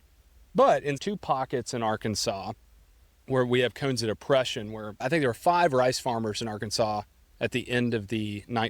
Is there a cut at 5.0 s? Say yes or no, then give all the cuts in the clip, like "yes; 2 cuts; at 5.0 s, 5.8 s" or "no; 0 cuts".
yes; 2 cuts; at 1.0 s, 5.0 s